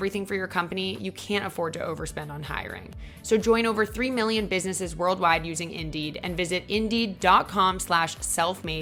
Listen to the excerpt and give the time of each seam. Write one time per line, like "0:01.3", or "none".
none